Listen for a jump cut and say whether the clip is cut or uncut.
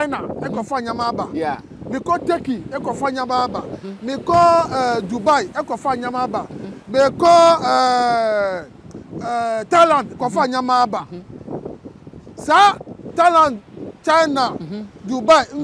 uncut